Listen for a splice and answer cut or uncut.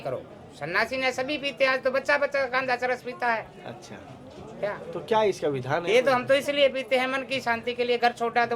uncut